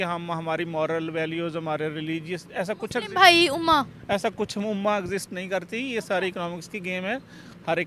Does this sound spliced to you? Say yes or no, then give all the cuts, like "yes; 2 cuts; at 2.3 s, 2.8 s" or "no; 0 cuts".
no; 0 cuts